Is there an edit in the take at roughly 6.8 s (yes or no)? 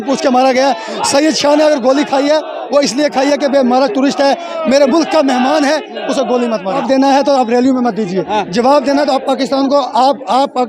yes